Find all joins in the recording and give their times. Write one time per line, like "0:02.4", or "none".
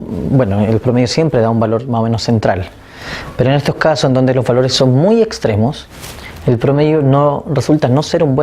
0:07.5